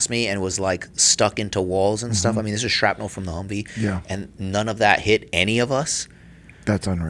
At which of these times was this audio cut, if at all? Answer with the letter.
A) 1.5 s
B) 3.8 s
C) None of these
C